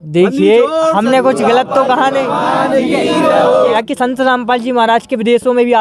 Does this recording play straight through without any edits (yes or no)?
no